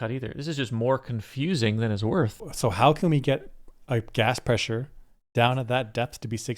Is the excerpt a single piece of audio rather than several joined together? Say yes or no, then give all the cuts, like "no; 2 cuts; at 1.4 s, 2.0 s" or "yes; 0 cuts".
no; 1 cut; at 2.5 s